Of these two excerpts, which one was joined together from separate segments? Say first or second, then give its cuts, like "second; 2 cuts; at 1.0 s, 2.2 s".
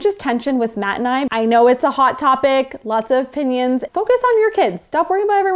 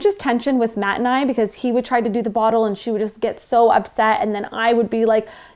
first; 2 cuts; at 1.3 s, 3.9 s